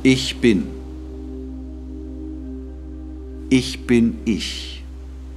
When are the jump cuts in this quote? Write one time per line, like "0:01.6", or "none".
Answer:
0:00.7
0:03.5
0:04.5